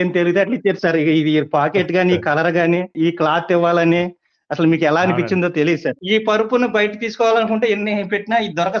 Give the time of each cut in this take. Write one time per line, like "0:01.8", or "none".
0:02.9
0:06.0